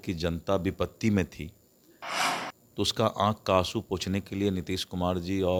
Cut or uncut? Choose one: uncut